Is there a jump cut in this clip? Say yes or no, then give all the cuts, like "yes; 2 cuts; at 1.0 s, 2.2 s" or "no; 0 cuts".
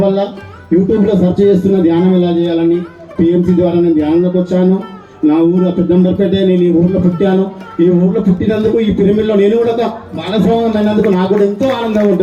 no; 0 cuts